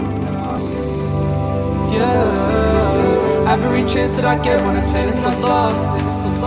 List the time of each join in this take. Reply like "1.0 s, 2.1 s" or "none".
none